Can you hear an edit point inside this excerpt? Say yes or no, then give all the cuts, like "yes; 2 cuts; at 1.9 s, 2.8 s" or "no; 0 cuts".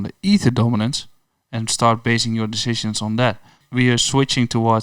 yes; 1 cut; at 3.6 s